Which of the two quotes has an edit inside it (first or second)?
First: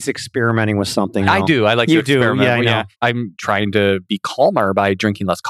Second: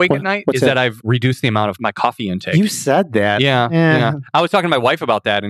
first